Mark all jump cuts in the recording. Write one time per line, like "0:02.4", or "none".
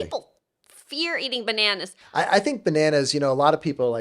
0:02.0